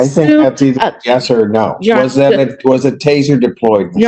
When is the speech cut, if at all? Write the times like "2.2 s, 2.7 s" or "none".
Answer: none